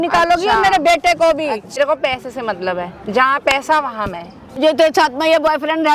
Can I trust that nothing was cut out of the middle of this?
no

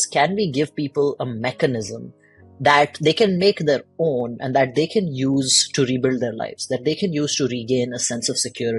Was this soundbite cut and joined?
no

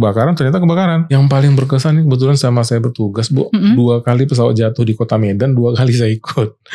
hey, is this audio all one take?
no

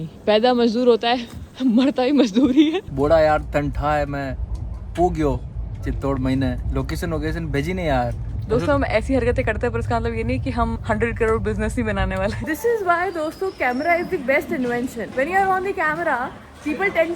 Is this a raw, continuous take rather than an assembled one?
no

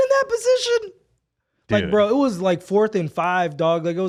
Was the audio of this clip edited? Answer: no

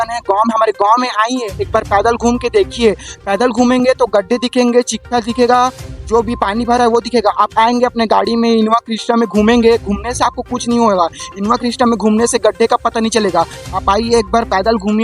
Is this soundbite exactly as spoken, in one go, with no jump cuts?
yes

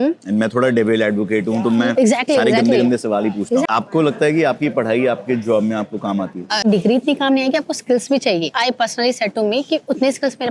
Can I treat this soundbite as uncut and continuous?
no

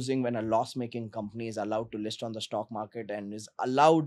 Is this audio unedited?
yes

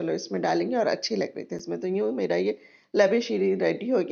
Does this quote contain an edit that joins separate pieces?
no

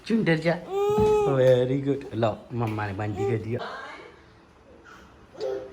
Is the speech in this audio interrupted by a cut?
yes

